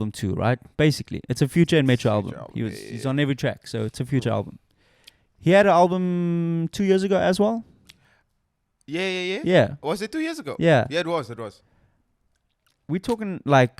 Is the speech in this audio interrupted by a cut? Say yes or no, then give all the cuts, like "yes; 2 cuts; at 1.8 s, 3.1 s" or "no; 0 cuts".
no; 0 cuts